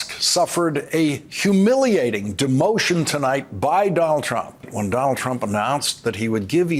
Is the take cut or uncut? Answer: uncut